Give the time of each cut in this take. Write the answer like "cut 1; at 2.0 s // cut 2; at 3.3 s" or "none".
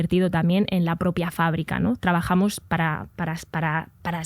none